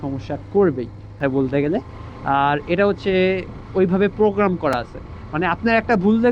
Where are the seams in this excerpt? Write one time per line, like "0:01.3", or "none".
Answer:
0:01.1

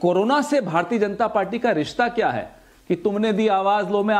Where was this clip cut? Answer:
none

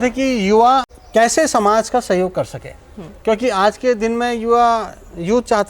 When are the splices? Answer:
0:01.0

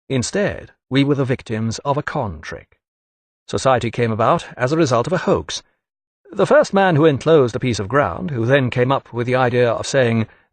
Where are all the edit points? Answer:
0:02.0

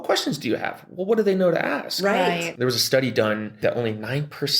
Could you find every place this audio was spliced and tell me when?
0:02.5
0:03.5

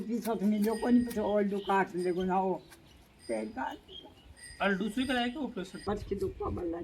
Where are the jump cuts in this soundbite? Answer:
0:05.9

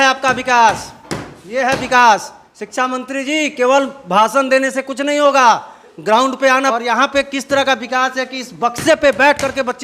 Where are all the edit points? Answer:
0:06.7

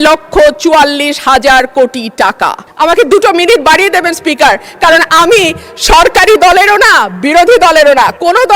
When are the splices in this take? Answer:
0:02.6

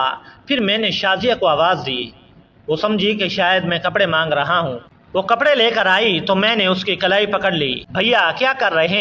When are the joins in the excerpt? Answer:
0:05.3
0:07.8

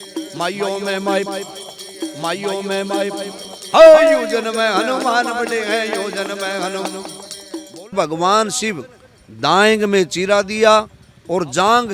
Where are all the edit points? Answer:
0:07.9

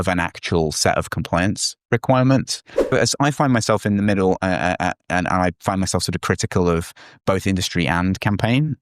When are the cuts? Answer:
0:02.9

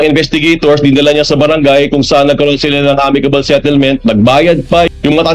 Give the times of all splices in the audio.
none

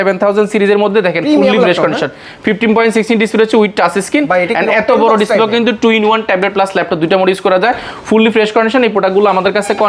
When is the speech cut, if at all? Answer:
none

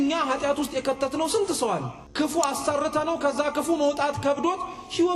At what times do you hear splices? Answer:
none

